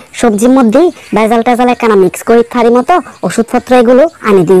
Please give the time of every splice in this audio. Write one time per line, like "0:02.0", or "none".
none